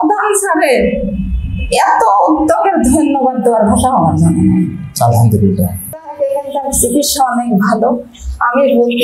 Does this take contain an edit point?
yes; 1 cut; at 6.1 s

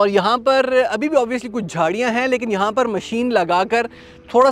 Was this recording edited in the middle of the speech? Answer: no; 0 cuts

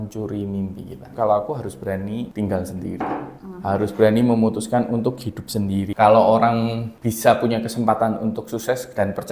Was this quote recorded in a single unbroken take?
no; 2 cuts; at 1.0 s, 5.9 s

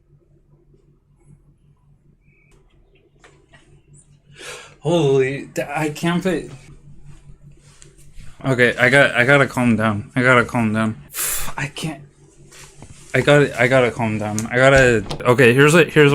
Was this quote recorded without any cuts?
no; 1 cut; at 15.2 s

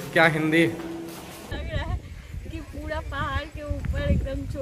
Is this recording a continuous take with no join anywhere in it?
no; 1 cut; at 1.5 s

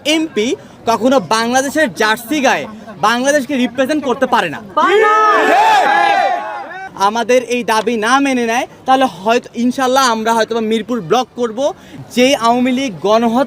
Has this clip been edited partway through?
yes; 2 cuts; at 6.8 s, 11.9 s

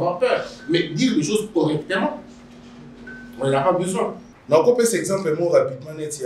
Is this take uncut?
no; 1 cut; at 4.3 s

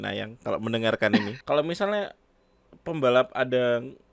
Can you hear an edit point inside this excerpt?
yes; 1 cut; at 1.4 s

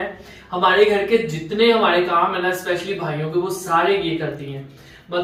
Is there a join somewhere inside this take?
no; 0 cuts

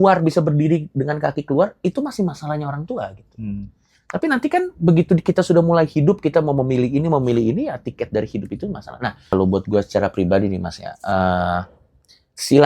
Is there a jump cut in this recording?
yes; 1 cut; at 9.2 s

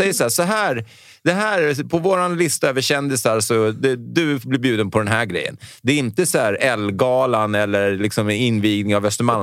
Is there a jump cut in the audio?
no; 0 cuts

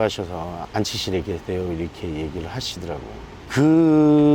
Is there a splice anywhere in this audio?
no; 0 cuts

